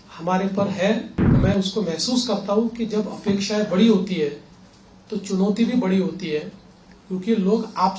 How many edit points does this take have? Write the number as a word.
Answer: one